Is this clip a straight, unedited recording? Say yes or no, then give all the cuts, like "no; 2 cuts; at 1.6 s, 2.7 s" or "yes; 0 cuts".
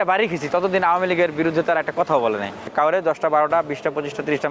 no; 1 cut; at 2.7 s